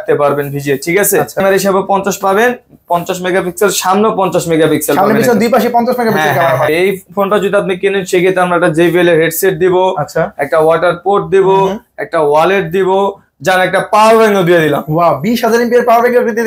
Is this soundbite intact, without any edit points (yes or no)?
no